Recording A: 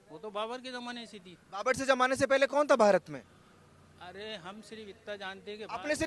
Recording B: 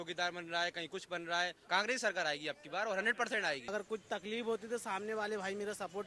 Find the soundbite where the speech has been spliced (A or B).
B